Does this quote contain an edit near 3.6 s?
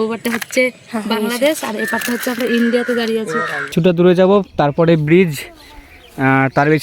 yes; 1 cut; at 3.6 s

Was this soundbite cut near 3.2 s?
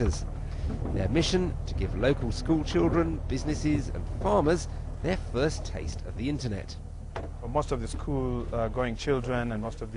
yes; 1 cut; at 3.2 s

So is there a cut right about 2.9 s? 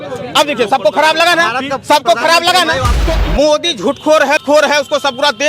yes; 2 cuts; at 2.9 s, 4.4 s

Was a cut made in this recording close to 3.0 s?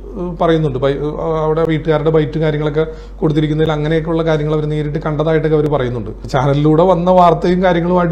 no; 0 cuts

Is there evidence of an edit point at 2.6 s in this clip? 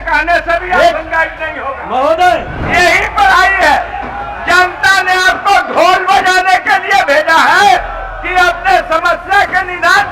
yes; 1 cut; at 2.6 s

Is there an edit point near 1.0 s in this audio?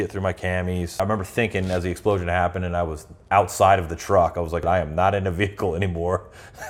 yes; 2 cuts; at 1.0 s, 4.5 s

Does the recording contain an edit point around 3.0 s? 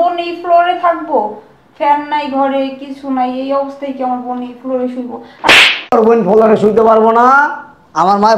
no; 1 cut; at 5.6 s

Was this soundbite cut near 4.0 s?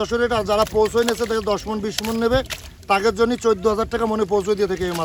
no; 0 cuts

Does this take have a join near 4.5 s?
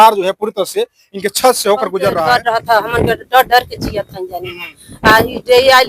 no; 1 cut; at 2.2 s

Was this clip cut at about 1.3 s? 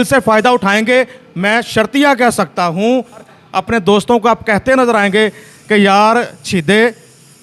no; 1 cut; at 3.4 s

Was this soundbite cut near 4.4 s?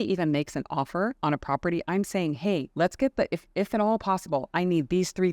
no; 2 cuts; at 1.2 s, 2.7 s

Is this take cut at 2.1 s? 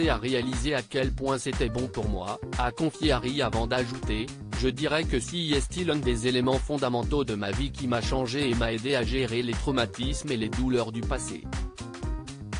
no; 1 cut; at 11.3 s

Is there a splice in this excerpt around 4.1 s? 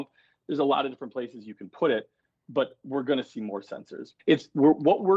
yes; 1 cut; at 4.1 s

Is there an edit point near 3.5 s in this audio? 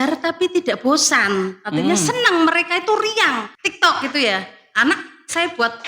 yes; 1 cut; at 3.5 s

